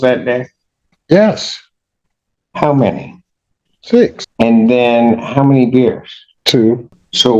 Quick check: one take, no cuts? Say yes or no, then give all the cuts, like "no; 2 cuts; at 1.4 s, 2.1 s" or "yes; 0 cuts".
yes; 0 cuts